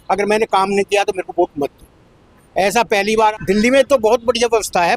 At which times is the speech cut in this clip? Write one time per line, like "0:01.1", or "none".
0:03.3